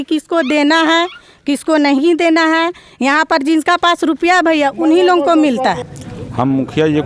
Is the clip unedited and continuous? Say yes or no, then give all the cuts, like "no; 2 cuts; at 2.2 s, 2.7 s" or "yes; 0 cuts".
no; 1 cut; at 5.8 s